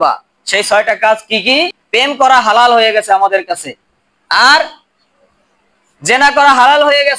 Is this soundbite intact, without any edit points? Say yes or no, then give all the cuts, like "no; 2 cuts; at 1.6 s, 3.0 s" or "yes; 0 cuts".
no; 1 cut; at 1.8 s